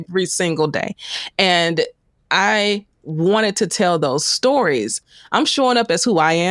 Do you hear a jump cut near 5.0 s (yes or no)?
yes